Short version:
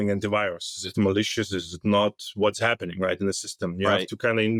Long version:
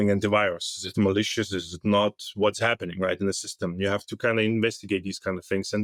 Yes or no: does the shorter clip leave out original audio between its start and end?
no